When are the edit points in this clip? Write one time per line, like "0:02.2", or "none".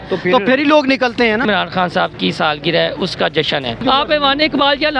0:01.4
0:03.8